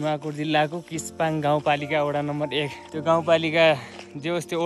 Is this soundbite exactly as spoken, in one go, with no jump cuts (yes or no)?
yes